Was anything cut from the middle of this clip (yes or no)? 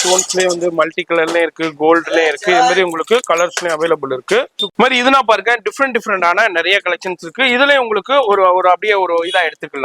no